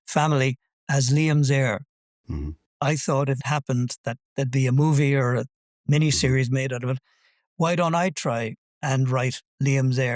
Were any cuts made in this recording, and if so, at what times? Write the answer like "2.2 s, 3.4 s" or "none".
2.5 s, 3.4 s